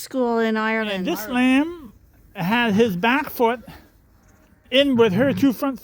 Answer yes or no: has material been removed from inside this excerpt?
yes